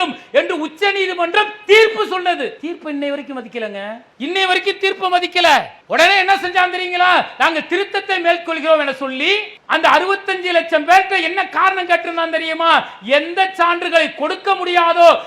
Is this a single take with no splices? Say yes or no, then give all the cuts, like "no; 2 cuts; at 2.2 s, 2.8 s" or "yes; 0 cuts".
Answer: no; 3 cuts; at 4.1 s, 5.8 s, 9.5 s